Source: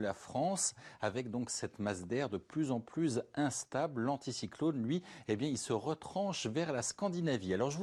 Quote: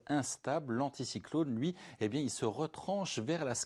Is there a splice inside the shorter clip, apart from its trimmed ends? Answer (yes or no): no